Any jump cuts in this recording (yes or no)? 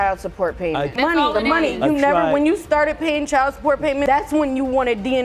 no